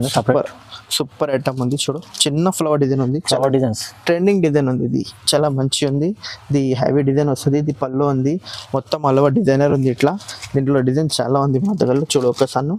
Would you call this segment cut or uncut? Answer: uncut